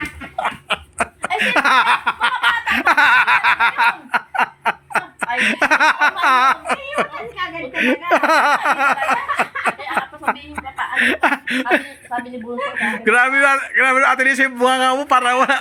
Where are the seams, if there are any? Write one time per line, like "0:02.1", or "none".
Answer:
none